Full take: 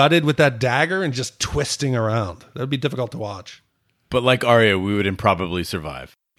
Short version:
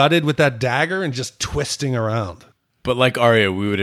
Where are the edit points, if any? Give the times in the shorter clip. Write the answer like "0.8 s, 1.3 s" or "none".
2.4 s